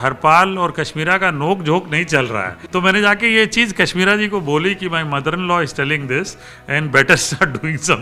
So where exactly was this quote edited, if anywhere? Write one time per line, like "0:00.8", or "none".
0:02.6